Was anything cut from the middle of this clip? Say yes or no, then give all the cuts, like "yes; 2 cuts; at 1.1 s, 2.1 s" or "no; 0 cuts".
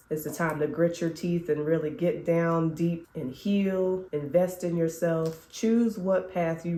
no; 0 cuts